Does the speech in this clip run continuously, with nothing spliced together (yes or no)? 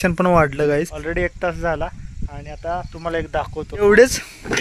no